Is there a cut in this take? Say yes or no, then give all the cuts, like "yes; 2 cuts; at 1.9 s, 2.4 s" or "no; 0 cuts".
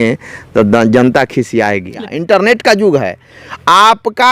yes; 1 cut; at 2.0 s